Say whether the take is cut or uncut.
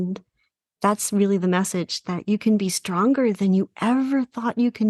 uncut